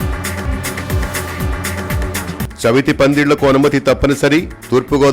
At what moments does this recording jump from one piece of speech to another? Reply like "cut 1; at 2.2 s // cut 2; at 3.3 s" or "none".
cut 1; at 2.3 s